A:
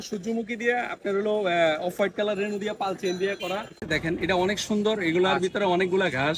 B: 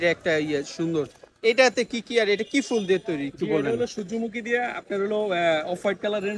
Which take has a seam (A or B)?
A